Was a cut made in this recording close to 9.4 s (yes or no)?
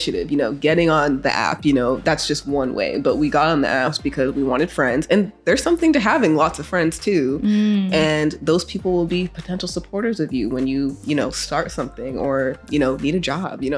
no